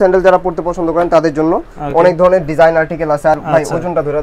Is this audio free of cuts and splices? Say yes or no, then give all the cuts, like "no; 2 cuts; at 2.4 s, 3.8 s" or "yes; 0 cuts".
yes; 0 cuts